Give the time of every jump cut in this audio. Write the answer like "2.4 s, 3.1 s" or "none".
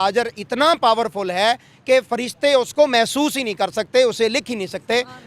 none